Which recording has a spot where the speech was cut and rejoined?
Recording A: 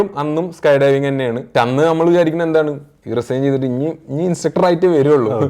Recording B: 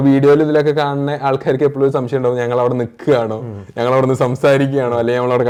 A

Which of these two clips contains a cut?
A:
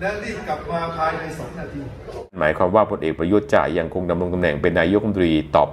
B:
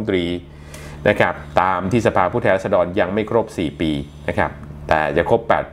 A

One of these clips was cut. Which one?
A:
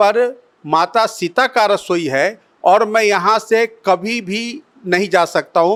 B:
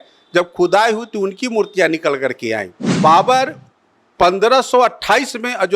B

